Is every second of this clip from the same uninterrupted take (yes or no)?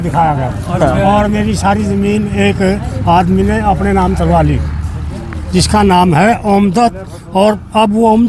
yes